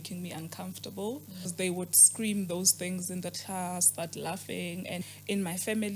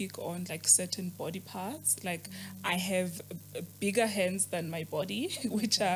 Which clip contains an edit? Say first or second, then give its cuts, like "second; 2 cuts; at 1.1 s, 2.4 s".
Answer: first; 3 cuts; at 1.5 s, 3.9 s, 5.0 s